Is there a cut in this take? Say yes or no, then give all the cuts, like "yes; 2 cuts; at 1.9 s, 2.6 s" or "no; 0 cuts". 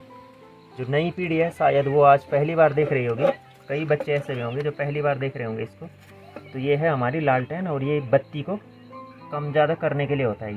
no; 0 cuts